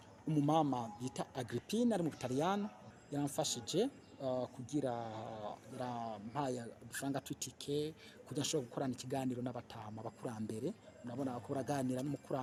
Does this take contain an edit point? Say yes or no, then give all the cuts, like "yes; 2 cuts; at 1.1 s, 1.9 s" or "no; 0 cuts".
no; 0 cuts